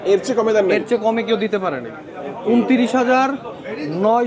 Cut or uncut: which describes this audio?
uncut